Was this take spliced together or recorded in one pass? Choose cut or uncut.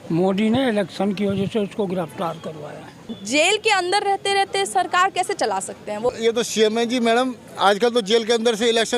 cut